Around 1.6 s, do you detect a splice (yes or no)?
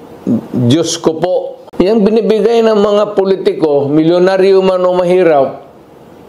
yes